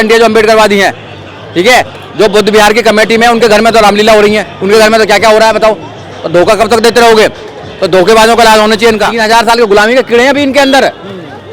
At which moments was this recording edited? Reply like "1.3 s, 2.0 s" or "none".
9.1 s